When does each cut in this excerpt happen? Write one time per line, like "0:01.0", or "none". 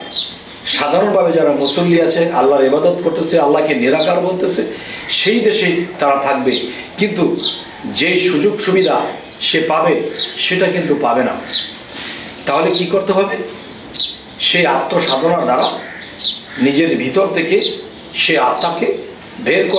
none

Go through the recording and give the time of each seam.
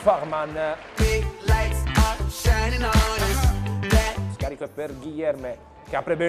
0:02.7

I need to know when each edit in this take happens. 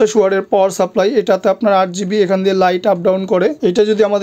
none

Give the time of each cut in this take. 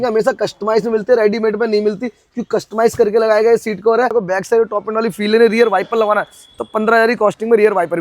0:04.1

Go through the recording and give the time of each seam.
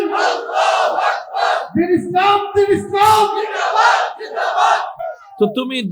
0:04.9

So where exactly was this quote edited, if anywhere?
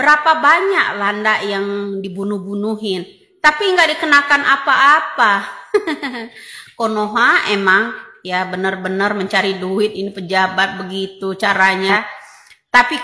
0:11.9

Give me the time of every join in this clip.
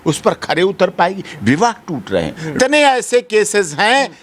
0:02.6

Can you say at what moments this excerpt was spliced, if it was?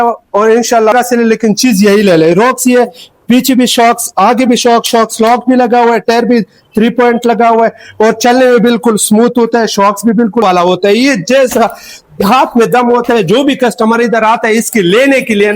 0:00.9
0:10.4

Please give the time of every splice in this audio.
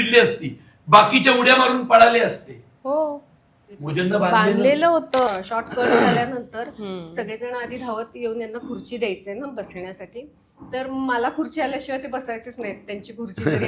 0:05.3

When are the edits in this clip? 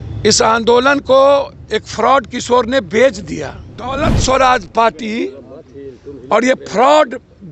0:03.9

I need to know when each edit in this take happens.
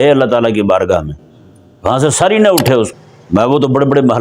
0:02.9

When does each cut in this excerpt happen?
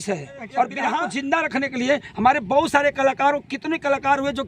0:01.1

